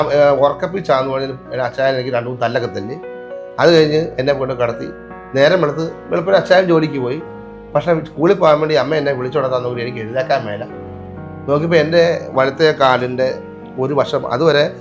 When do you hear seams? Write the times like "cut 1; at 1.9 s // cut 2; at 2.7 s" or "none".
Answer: none